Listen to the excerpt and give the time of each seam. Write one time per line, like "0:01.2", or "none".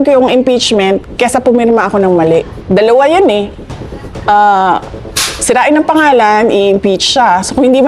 0:02.6